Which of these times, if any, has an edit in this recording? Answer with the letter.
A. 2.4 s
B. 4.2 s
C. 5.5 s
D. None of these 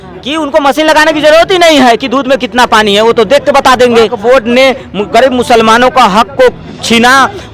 B